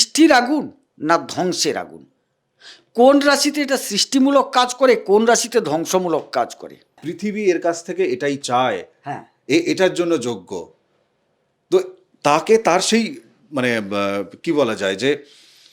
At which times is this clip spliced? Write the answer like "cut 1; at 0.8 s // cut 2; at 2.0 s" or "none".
cut 1; at 7.1 s